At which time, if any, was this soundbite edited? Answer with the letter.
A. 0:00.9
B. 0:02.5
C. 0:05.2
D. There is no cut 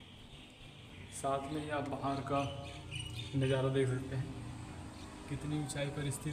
A